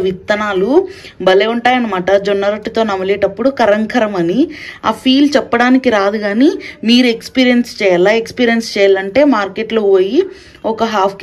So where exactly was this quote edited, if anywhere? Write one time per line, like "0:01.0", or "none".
none